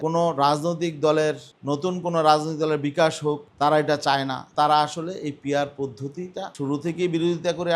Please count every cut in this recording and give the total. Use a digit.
2